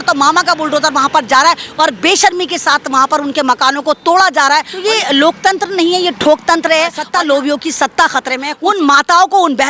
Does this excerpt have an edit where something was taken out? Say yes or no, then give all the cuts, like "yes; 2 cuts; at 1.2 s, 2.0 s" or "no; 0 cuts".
yes; 3 cuts; at 4.7 s, 7.0 s, 8.5 s